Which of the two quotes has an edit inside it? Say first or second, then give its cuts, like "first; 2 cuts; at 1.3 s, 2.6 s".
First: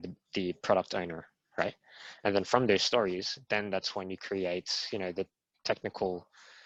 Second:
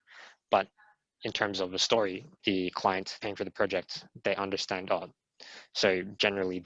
second; 2 cuts; at 2.3 s, 3.1 s